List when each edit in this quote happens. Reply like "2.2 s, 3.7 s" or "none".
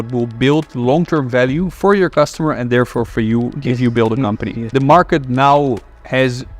4.6 s

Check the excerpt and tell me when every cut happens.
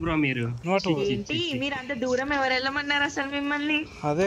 none

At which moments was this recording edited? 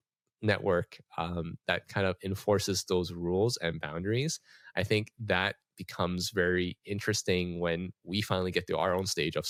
none

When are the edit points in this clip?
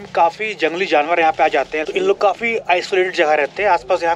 1.8 s

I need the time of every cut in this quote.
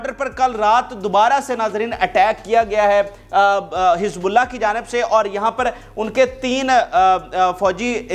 none

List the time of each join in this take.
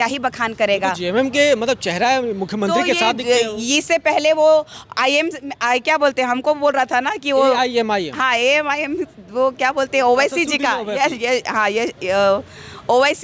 none

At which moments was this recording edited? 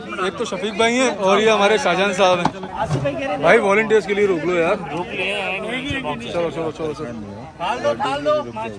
1.2 s, 2.7 s

